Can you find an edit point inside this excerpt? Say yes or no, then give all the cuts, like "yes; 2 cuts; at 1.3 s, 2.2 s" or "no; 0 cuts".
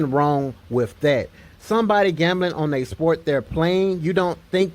yes; 1 cut; at 2.3 s